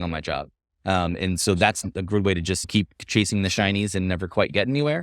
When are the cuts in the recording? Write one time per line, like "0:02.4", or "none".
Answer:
0:02.6